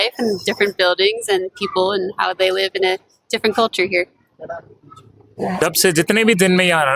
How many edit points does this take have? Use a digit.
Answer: 1